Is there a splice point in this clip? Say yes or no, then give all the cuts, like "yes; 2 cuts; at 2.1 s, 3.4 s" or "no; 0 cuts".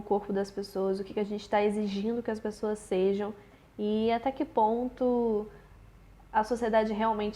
no; 0 cuts